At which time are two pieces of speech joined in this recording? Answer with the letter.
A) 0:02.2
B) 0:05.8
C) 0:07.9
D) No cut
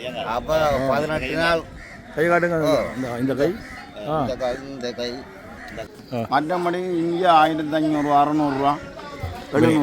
B